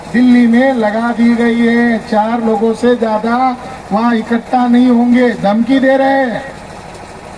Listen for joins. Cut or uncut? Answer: uncut